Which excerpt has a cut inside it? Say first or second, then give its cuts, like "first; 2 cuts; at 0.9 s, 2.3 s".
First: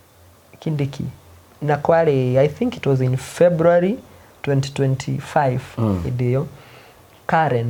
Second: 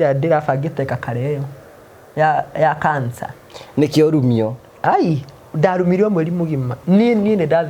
second; 1 cut; at 6.7 s